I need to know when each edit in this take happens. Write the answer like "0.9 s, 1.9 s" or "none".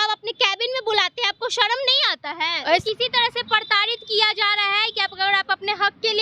2.8 s